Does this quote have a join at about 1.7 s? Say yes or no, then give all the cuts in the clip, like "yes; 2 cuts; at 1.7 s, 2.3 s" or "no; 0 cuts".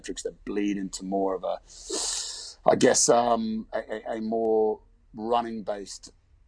no; 0 cuts